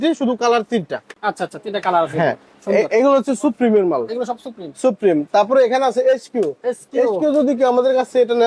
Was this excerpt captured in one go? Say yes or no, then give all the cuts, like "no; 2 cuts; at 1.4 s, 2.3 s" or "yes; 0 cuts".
yes; 0 cuts